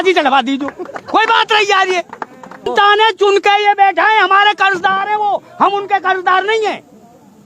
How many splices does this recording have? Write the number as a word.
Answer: one